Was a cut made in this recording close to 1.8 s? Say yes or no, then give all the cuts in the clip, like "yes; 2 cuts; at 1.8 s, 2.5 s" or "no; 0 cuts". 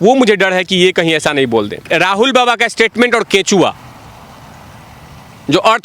yes; 1 cut; at 1.8 s